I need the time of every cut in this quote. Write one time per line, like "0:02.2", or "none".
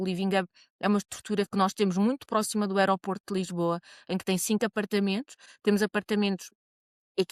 none